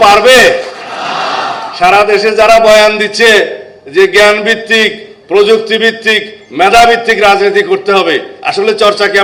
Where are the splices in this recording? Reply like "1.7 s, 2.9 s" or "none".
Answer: none